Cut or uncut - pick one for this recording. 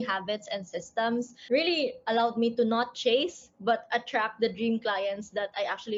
uncut